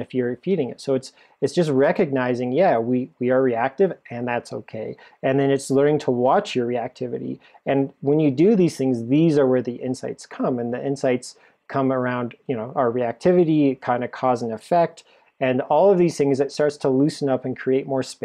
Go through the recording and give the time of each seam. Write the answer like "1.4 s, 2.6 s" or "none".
none